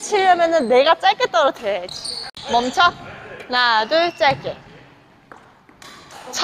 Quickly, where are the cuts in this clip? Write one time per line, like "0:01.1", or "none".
0:02.3